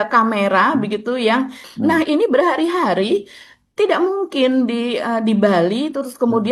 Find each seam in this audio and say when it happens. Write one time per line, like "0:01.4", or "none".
0:01.6